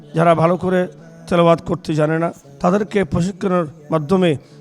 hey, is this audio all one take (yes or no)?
no